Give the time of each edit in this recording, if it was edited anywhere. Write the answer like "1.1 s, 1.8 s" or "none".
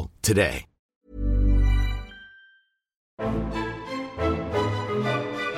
0.9 s, 3.1 s

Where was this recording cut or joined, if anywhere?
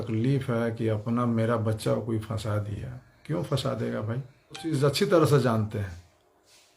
4.8 s

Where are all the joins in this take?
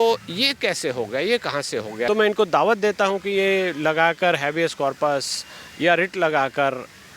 2.1 s

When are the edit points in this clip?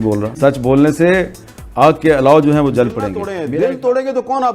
3.4 s

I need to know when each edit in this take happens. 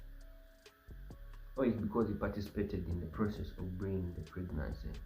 none

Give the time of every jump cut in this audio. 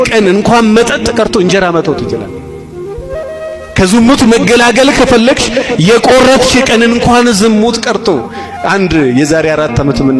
none

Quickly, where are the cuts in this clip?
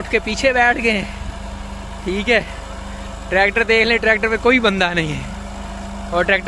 none

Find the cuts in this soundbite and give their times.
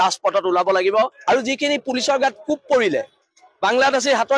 1.2 s

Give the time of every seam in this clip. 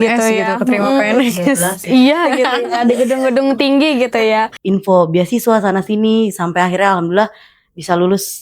4.5 s

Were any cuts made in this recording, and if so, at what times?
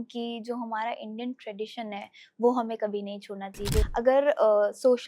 3.9 s

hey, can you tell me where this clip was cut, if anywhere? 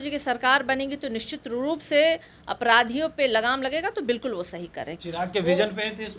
4.9 s

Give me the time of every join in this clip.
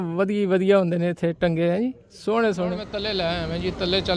2.8 s

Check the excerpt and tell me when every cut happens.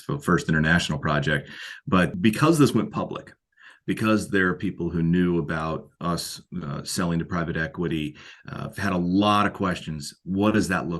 2.1 s

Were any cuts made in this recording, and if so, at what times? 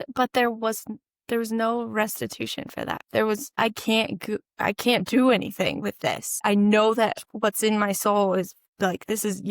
3.6 s, 6.3 s, 8.6 s

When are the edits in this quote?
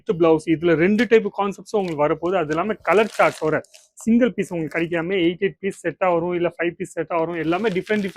none

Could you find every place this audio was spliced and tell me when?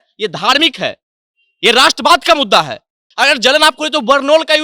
3.0 s

